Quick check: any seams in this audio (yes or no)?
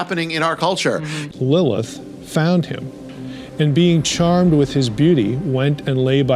yes